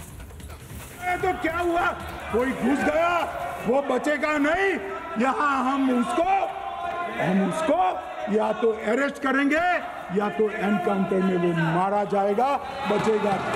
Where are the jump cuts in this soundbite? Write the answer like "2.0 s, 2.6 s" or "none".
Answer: 1.0 s